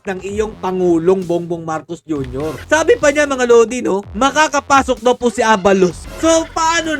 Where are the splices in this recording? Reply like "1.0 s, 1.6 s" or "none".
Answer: 2.6 s, 6.0 s